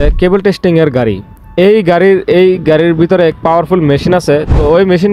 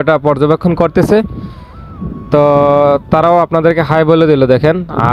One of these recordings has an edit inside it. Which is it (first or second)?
first